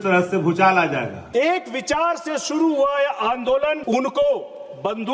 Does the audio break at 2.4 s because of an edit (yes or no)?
no